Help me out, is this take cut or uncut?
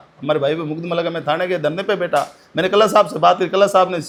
uncut